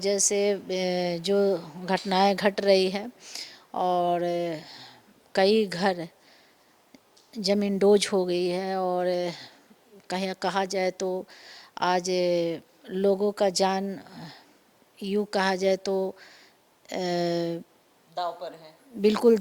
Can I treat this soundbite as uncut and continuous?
yes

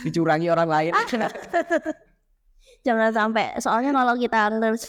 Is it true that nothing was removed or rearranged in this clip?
yes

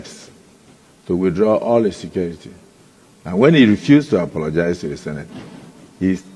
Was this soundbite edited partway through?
no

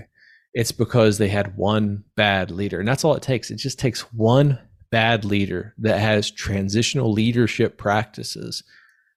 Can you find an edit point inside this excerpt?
no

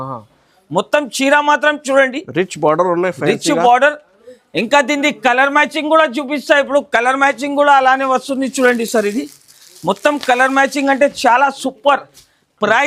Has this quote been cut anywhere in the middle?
no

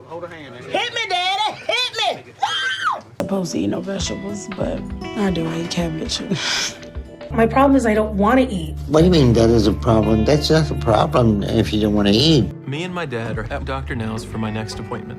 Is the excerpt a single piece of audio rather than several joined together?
no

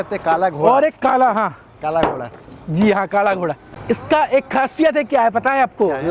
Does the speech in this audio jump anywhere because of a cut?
yes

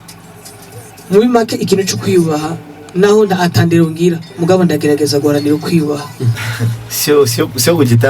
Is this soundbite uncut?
no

